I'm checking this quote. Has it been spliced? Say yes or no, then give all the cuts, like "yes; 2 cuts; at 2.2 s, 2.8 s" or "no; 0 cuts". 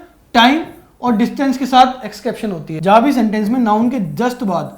yes; 1 cut; at 2.7 s